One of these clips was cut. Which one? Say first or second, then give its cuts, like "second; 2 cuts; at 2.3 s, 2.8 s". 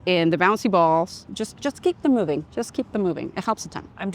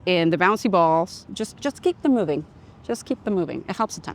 first; 1 cut; at 2.5 s